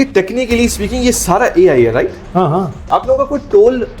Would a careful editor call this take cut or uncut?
cut